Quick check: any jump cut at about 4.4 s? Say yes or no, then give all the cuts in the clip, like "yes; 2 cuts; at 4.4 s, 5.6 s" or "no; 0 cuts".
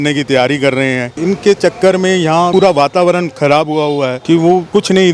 yes; 3 cuts; at 1.1 s, 2.5 s, 4.4 s